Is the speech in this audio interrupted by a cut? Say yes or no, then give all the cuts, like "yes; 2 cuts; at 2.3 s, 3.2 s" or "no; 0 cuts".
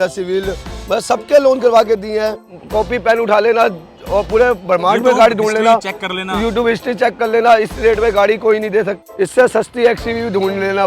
yes; 2 cuts; at 2.4 s, 9.0 s